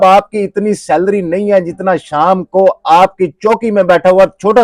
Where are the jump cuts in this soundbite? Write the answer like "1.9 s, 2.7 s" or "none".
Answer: none